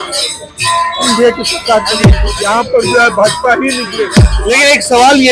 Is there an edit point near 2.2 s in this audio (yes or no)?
yes